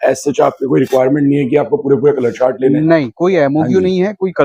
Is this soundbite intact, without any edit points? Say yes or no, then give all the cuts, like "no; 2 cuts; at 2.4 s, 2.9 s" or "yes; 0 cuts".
yes; 0 cuts